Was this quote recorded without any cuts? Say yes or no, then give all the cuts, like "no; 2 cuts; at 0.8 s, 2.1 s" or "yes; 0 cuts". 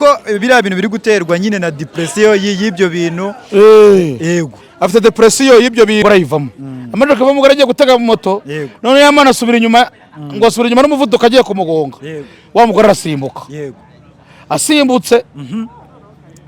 no; 1 cut; at 6.0 s